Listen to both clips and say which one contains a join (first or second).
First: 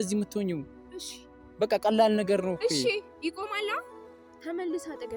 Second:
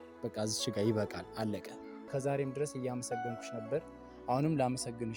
second